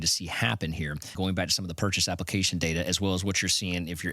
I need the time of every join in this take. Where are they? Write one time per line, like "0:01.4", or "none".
0:01.1